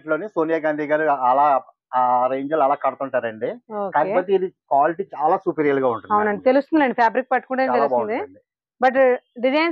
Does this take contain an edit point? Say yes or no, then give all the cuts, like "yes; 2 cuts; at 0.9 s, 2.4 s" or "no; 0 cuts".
no; 0 cuts